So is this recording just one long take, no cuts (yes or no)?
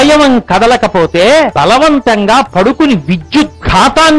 no